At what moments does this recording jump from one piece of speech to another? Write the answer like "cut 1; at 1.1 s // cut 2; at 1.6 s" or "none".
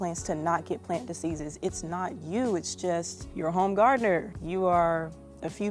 cut 1; at 3.2 s // cut 2; at 4.4 s